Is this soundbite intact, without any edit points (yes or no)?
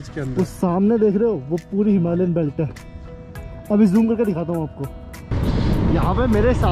no